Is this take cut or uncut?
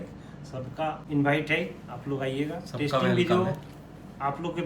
cut